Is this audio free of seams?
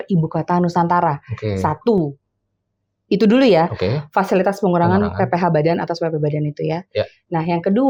yes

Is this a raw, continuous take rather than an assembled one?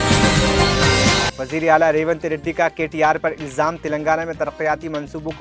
no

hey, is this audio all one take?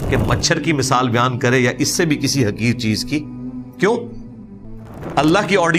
yes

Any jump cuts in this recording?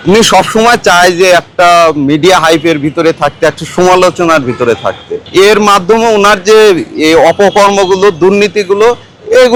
no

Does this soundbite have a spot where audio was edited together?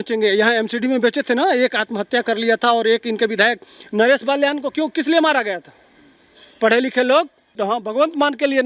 yes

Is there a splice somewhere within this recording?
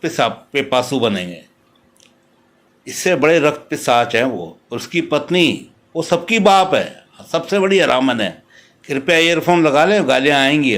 no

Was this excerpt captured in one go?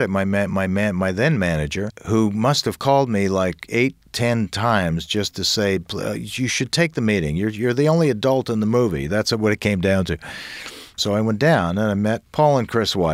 no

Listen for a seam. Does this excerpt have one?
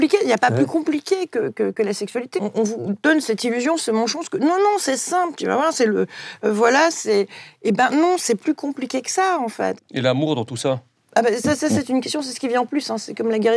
yes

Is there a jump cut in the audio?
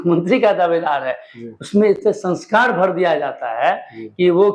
no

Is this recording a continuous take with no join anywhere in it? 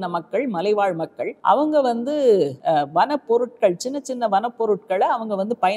no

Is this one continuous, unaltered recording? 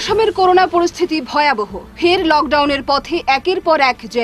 yes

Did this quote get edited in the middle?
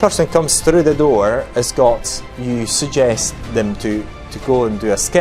no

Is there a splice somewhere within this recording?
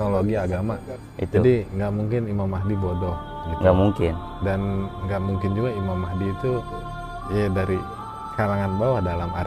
no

